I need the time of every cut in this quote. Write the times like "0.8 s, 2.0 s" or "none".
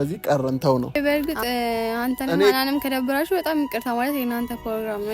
1.0 s